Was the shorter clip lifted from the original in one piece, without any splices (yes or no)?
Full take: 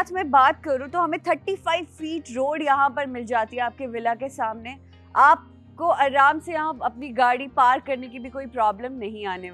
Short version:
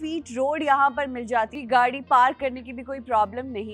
no